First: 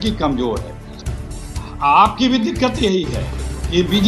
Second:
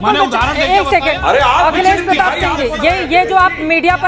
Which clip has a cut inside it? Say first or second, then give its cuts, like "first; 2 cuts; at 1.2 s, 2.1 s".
first; 1 cut; at 1.1 s